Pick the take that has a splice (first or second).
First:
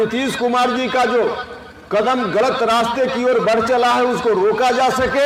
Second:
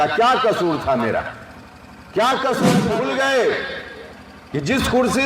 second